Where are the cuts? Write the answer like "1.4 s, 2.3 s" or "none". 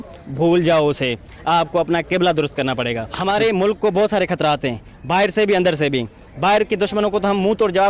3.1 s